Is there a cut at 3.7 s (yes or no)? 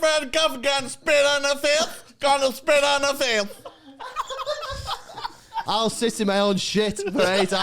no